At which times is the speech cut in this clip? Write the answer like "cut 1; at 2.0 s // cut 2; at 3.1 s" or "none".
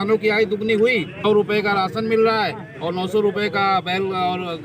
cut 1; at 1.2 s